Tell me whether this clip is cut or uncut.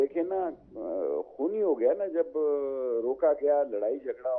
uncut